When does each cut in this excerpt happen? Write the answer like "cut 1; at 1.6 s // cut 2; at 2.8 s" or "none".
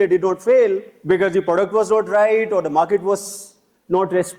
cut 1; at 0.9 s